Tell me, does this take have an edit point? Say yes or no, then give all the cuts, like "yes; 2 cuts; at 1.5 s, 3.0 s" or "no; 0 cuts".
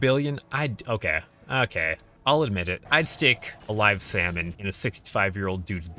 yes; 4 cuts; at 2.1 s, 2.8 s, 3.5 s, 4.5 s